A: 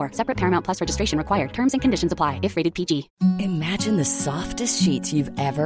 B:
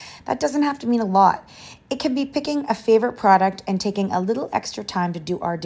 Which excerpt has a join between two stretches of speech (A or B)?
A